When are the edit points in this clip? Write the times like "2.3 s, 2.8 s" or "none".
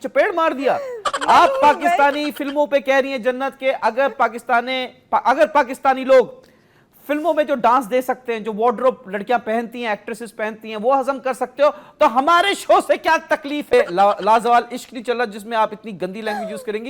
13.7 s